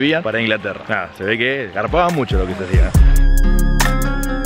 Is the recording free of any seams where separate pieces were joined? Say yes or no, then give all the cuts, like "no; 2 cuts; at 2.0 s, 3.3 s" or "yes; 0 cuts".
yes; 0 cuts